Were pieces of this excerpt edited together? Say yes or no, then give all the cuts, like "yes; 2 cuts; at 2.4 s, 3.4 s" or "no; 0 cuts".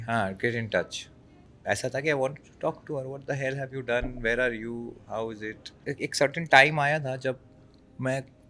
yes; 2 cuts; at 1.5 s, 5.8 s